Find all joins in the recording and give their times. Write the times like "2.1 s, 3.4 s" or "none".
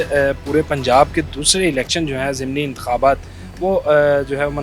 none